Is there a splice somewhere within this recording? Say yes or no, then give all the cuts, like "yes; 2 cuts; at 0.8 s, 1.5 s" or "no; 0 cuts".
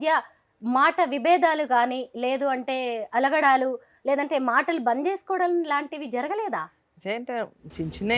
no; 0 cuts